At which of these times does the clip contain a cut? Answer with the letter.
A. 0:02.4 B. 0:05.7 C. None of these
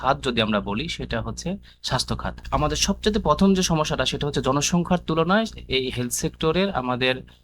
A